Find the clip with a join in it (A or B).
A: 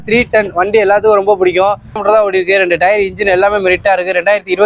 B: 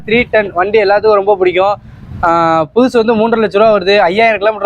A